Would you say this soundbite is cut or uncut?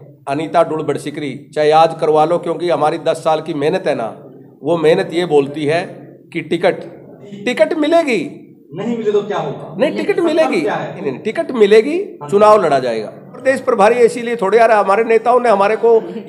cut